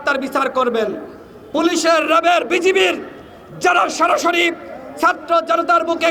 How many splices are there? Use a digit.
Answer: 0